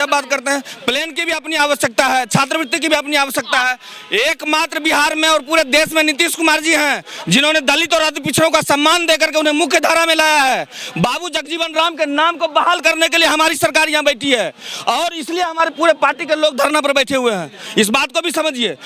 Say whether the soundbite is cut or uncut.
uncut